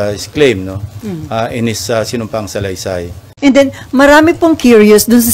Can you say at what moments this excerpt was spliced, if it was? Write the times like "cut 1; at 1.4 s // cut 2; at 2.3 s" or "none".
cut 1; at 3.2 s

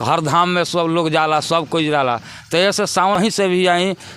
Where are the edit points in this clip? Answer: cut 1; at 3.2 s

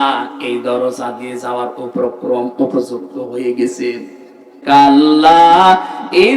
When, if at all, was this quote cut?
cut 1; at 4.5 s

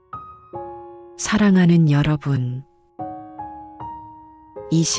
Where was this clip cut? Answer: cut 1; at 1.2 s

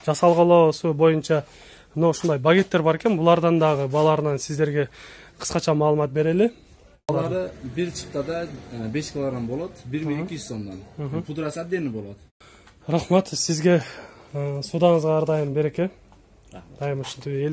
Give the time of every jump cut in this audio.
cut 1; at 7.1 s // cut 2; at 12.2 s

